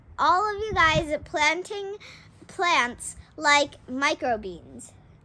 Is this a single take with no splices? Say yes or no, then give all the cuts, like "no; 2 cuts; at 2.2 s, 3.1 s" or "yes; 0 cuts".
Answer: yes; 0 cuts